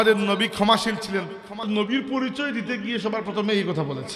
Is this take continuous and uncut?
no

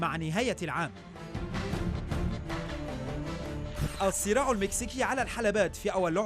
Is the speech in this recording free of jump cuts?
yes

